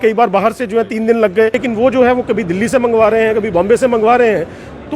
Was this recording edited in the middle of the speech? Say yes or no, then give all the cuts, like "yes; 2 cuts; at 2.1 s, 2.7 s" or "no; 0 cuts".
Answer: yes; 1 cut; at 1.6 s